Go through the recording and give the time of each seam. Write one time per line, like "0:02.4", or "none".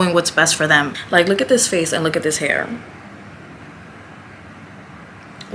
0:01.0